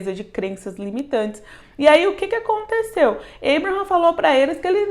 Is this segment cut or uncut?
uncut